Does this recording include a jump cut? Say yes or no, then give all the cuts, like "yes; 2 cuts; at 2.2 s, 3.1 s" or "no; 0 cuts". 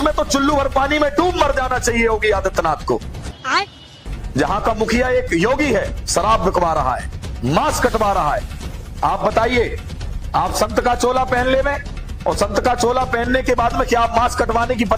no; 0 cuts